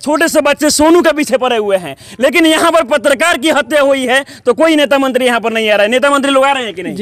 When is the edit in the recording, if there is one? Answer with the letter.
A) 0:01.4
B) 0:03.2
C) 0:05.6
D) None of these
D